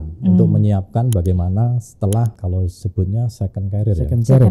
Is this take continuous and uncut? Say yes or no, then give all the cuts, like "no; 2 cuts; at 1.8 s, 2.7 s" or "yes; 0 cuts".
no; 1 cut; at 2.4 s